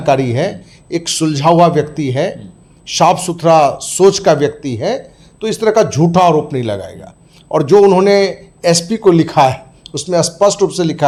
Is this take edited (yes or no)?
no